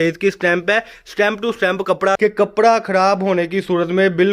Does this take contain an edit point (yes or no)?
yes